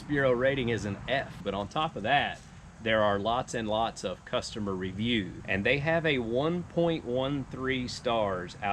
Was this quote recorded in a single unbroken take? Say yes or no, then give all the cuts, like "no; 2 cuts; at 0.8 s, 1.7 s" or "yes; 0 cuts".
no; 2 cuts; at 1.4 s, 5.4 s